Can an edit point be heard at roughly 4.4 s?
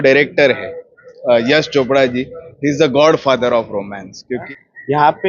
yes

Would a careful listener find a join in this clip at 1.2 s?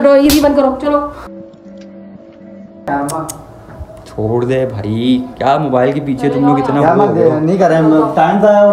no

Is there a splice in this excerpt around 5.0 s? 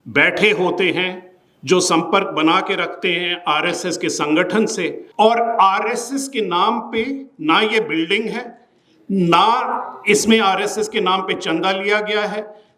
yes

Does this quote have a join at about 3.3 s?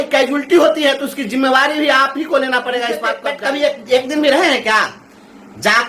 yes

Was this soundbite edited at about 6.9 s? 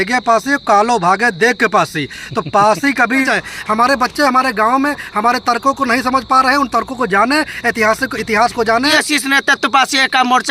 no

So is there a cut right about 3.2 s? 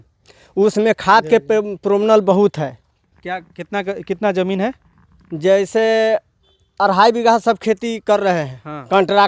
no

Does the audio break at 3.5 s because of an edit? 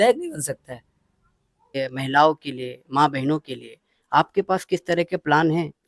no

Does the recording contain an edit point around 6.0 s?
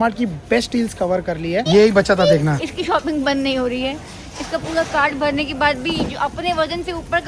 no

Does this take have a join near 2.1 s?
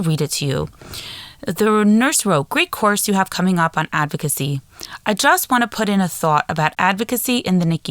no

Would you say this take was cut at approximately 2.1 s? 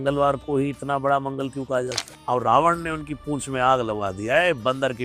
yes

